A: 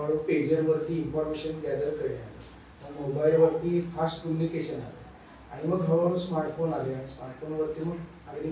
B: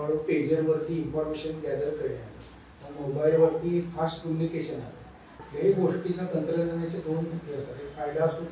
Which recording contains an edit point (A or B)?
B